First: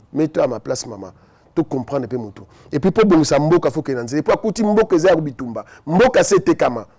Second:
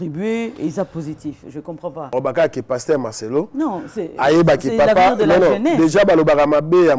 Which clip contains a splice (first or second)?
second